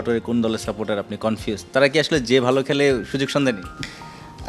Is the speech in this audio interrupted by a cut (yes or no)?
no